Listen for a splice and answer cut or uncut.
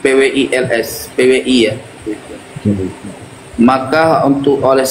uncut